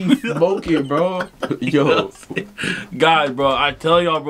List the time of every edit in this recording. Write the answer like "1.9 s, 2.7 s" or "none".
none